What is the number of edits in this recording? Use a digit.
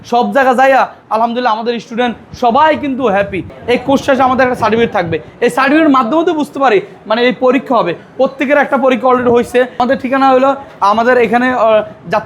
2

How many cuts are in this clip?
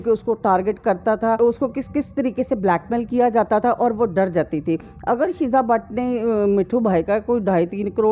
1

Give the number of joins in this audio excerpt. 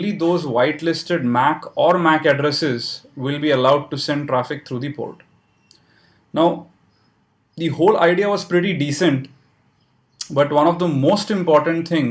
1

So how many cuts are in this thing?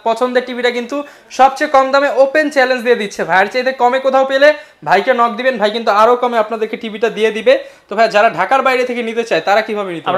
0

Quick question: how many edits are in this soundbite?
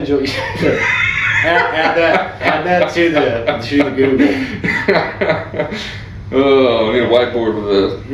0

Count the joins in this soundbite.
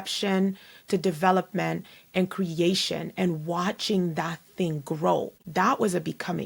1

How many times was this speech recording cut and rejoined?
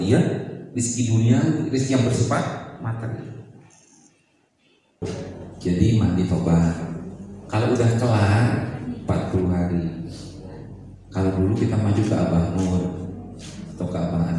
1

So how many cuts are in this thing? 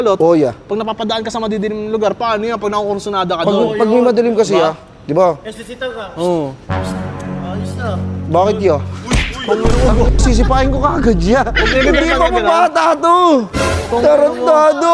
0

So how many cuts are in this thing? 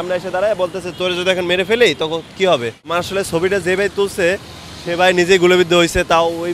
1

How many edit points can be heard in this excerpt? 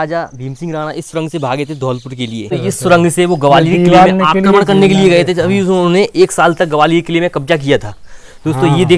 1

